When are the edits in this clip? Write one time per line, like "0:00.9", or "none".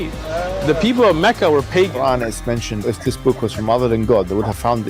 0:02.2